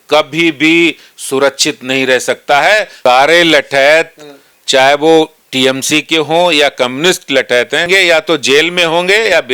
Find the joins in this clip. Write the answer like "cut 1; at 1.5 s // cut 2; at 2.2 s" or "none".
cut 1; at 2.9 s // cut 2; at 7.9 s